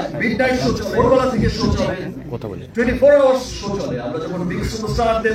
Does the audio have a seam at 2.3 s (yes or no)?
no